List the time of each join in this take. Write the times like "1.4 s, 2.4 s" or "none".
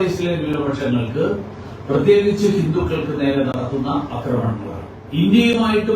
4.9 s